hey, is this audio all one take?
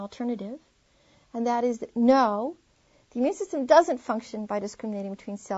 yes; 0 cuts

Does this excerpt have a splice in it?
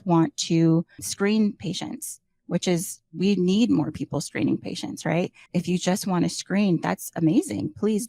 no; 0 cuts

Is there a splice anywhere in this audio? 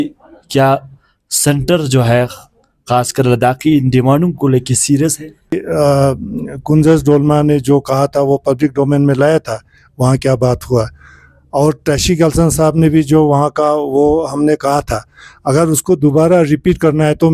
yes; 1 cut; at 5.5 s

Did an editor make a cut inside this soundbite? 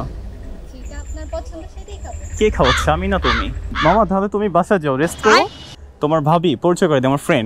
yes; 1 cut; at 3.7 s

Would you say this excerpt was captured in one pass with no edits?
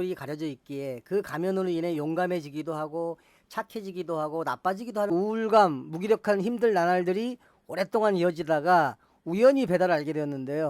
no; 1 cut; at 5.1 s

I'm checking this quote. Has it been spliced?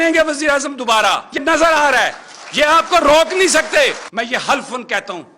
yes; 2 cuts; at 1.4 s, 4.0 s

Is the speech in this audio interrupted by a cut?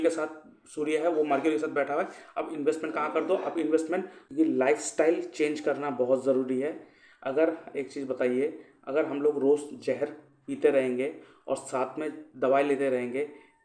yes; 1 cut; at 4.2 s

